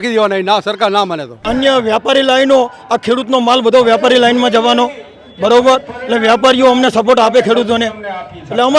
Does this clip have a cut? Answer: yes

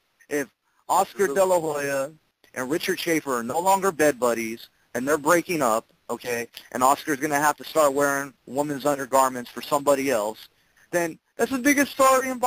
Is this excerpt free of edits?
yes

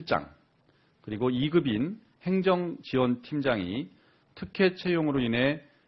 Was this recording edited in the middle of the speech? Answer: yes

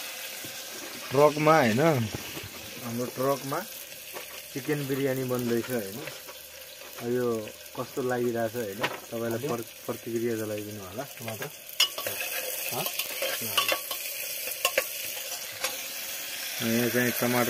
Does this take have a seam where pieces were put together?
no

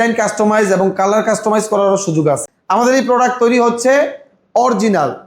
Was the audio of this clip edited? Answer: yes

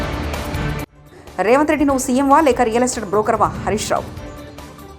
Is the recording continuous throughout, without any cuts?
no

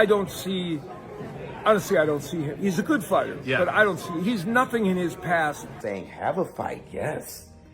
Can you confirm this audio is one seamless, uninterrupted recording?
no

